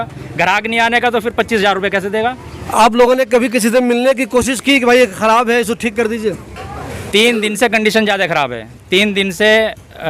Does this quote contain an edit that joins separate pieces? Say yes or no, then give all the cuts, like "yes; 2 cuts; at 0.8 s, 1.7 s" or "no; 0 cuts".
no; 0 cuts